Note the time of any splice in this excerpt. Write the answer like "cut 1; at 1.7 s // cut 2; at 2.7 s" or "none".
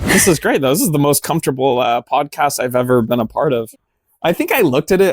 cut 1; at 3.7 s